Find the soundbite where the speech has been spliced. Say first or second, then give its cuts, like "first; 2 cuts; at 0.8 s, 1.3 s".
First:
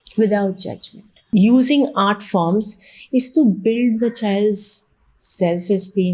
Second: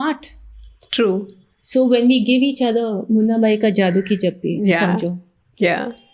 first; 1 cut; at 1.2 s